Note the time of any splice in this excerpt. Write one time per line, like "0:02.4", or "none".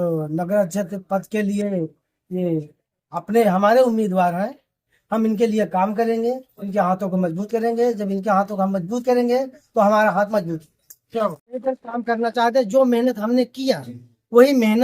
0:11.6